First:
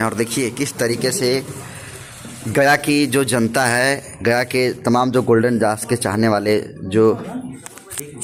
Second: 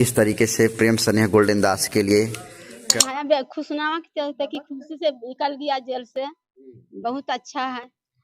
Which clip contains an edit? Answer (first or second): second